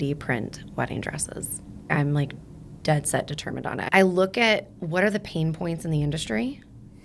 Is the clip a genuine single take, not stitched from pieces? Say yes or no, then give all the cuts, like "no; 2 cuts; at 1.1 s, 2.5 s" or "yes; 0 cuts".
no; 2 cuts; at 1.9 s, 3.8 s